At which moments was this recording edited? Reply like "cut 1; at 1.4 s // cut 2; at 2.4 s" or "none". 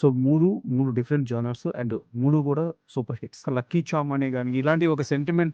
cut 1; at 3.5 s